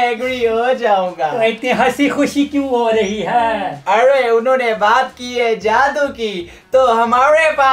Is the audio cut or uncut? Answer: uncut